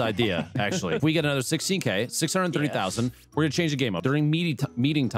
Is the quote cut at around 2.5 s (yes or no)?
no